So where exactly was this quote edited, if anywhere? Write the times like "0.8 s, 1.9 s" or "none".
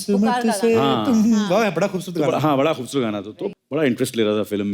3.4 s